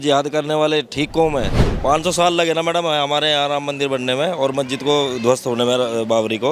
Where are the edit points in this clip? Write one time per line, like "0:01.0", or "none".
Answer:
0:01.6